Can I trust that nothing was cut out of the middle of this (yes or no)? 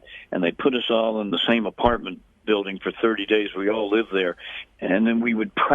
no